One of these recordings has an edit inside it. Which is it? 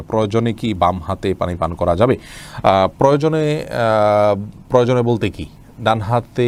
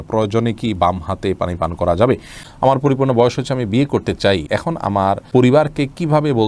second; 2 cuts; at 2.4 s, 4.9 s

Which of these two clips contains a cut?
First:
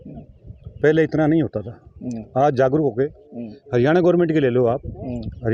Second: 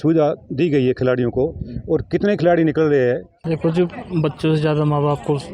second; 1 cut; at 3.4 s

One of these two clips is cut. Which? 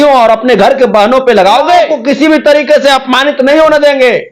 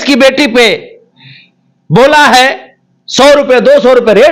first; 1 cut; at 2.0 s

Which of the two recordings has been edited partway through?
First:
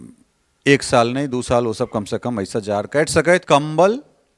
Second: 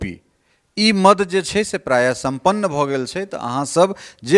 first; 1 cut; at 3.4 s

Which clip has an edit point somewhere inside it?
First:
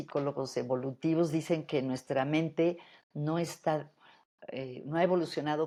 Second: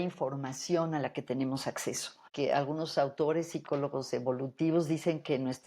second; 1 cut; at 2.3 s

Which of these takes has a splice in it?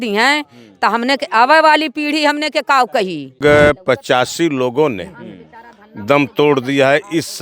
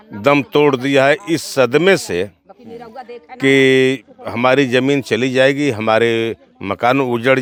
first; 1 cut; at 3.4 s

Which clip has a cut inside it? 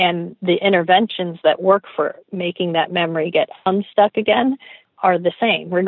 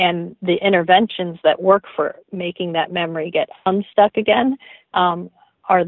first; 1 cut; at 4.7 s

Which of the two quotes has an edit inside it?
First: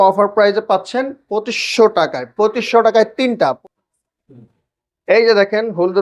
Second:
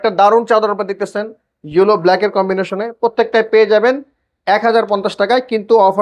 first; 1 cut; at 3.6 s

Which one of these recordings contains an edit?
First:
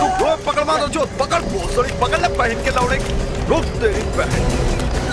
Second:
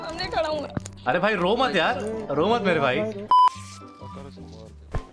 second; 1 cut; at 3.4 s

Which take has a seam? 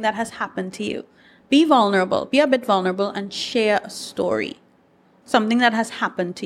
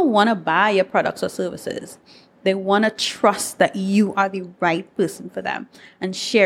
first; 1 cut; at 1.3 s

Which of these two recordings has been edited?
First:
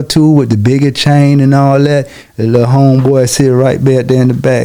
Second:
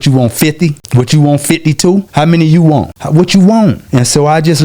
second; 4 cuts; at 0.8 s, 2.1 s, 3.0 s, 3.8 s

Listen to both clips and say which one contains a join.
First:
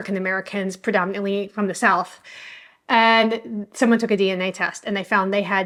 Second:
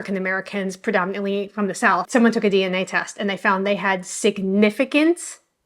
second; 1 cut; at 2.0 s

